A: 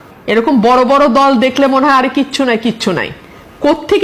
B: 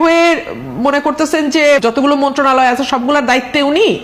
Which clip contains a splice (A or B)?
B